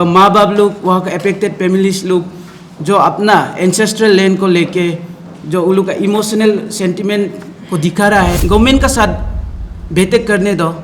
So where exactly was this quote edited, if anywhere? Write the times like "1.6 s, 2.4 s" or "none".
8.4 s